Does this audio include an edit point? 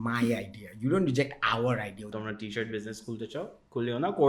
yes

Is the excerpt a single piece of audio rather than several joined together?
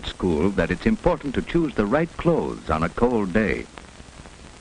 no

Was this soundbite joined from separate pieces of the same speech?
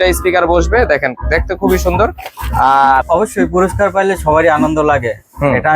yes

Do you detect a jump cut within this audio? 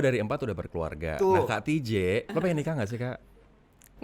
yes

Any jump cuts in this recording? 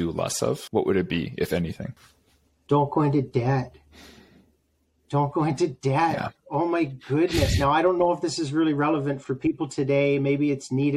no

